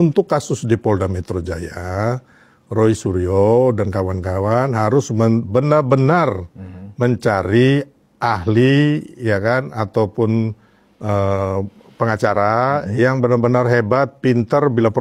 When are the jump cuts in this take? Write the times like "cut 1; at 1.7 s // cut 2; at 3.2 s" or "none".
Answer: none